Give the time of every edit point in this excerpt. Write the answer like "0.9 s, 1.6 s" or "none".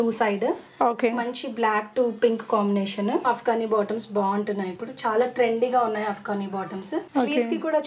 3.2 s, 7.1 s

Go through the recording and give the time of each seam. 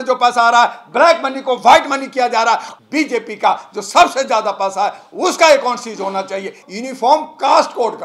2.7 s, 6.7 s

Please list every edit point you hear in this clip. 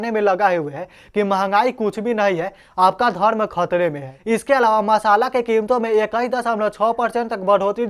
4.1 s

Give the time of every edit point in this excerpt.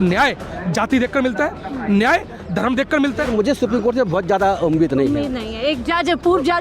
3.3 s

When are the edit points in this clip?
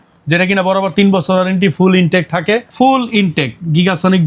2.7 s

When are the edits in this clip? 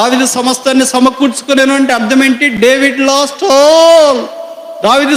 none

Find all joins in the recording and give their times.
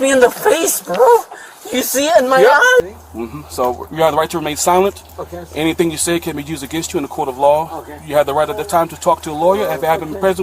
2.8 s

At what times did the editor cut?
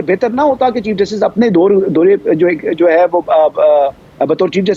none

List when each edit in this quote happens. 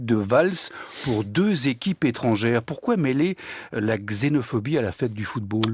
2.7 s

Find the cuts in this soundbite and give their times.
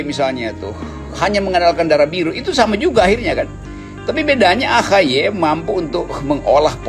none

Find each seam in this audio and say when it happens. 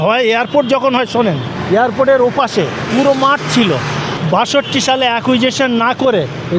1.5 s, 2.8 s, 4.1 s

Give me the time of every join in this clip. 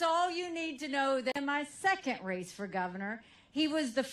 none

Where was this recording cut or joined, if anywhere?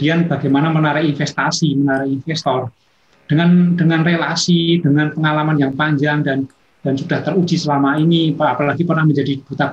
none

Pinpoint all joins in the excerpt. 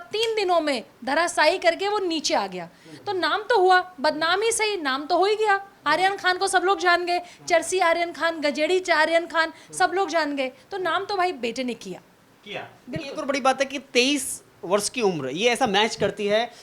none

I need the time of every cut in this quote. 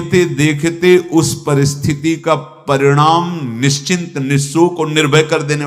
none

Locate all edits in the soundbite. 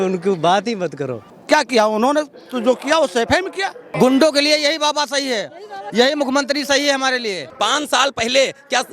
1.2 s, 3.8 s, 7.5 s

